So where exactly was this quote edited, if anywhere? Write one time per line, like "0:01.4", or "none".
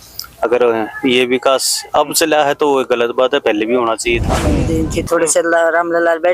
0:04.6